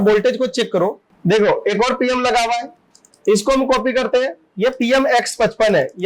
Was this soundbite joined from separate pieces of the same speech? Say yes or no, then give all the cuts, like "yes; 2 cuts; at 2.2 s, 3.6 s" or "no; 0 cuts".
yes; 1 cut; at 1.1 s